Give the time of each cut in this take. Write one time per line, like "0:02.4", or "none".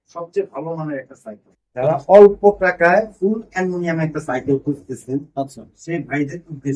0:01.8